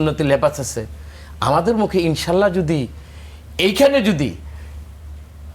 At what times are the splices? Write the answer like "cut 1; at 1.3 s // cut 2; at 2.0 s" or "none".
none